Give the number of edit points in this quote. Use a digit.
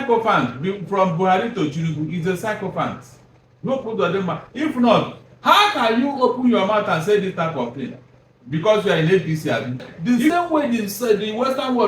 1